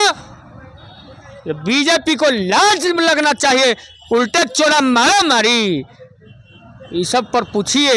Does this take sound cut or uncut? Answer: uncut